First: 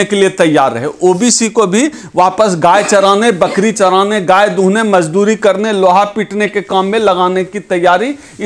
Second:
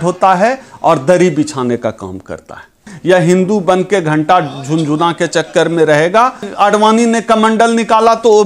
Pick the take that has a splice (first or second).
second